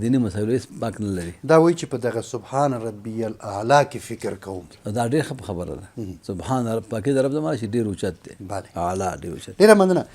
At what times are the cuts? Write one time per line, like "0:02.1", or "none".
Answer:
none